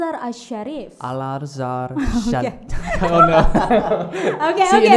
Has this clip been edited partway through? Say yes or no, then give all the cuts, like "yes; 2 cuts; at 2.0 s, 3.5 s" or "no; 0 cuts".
no; 0 cuts